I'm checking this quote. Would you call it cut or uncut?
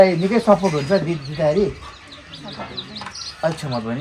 uncut